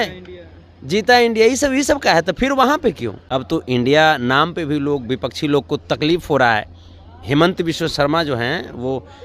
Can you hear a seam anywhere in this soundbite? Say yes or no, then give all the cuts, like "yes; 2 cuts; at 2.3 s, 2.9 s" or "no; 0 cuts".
yes; 1 cut; at 3.2 s